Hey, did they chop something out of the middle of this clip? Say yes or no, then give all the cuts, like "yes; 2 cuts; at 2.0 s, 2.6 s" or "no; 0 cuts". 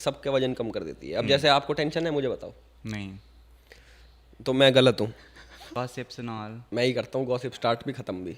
yes; 1 cut; at 5.7 s